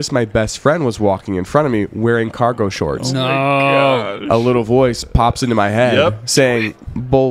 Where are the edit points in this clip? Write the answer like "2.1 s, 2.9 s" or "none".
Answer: none